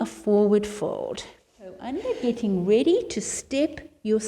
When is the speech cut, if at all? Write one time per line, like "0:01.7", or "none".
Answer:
0:01.8